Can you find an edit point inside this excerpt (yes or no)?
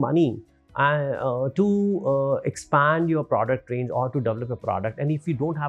no